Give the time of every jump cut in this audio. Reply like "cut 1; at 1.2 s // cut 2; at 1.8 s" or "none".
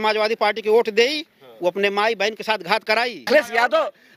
cut 1; at 3.3 s

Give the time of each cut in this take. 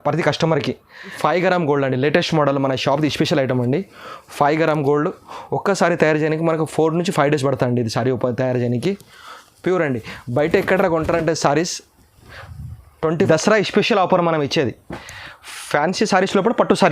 cut 1; at 1.1 s // cut 2; at 13.2 s

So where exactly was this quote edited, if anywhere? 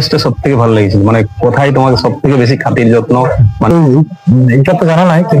cut 1; at 3.7 s

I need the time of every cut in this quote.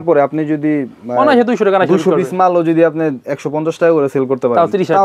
none

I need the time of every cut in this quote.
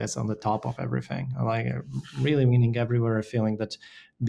none

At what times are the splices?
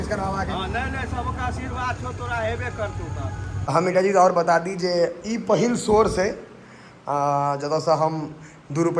cut 1; at 3.7 s

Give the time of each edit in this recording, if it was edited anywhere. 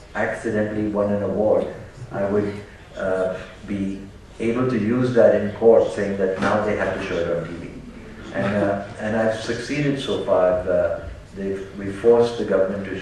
cut 1; at 3.8 s

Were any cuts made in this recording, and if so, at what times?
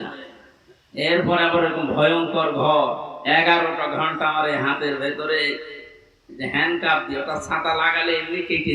cut 1; at 3.1 s

